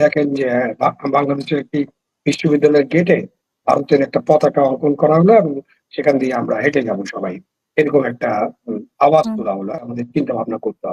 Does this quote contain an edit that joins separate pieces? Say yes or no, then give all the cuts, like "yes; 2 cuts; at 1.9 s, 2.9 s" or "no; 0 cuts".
yes; 1 cut; at 9.8 s